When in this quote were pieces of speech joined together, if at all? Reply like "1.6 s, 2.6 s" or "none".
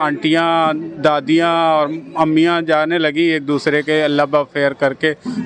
none